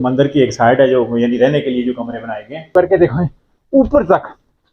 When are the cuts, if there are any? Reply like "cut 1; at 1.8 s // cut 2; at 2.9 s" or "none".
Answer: cut 1; at 2.7 s